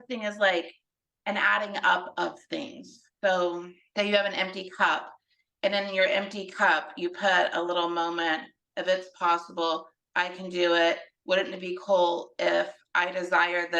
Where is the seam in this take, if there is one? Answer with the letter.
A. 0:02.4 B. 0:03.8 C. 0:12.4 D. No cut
B